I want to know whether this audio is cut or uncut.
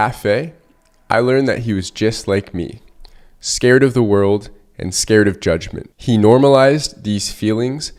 uncut